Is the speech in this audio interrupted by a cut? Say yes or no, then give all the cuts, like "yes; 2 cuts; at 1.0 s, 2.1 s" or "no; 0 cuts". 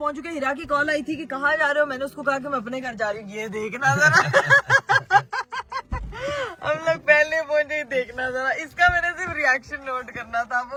no; 0 cuts